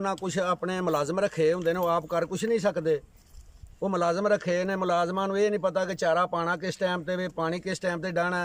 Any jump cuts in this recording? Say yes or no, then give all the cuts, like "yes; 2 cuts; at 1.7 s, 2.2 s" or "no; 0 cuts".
no; 0 cuts